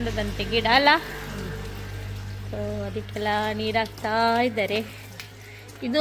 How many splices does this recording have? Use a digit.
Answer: 0